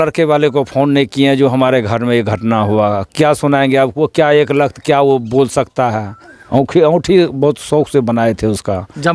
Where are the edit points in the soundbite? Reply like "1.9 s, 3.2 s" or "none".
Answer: 6.3 s